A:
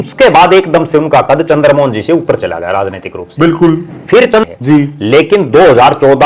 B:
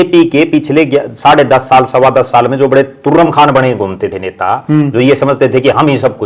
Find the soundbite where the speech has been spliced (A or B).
A